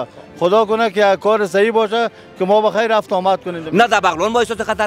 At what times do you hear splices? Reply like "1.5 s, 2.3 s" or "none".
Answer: 3.6 s